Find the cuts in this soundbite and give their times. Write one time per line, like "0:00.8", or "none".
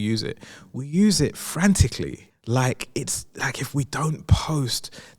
0:02.3